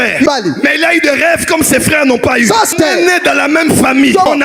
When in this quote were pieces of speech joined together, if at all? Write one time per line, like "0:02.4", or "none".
none